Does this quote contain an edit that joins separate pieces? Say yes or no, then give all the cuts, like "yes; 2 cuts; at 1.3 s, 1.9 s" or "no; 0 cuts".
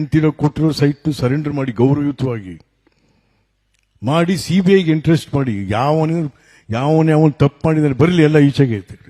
no; 0 cuts